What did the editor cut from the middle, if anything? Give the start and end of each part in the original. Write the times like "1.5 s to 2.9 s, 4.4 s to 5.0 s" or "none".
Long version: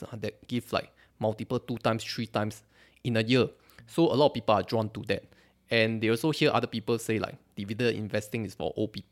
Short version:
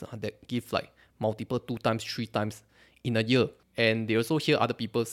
3.6 s to 5.6 s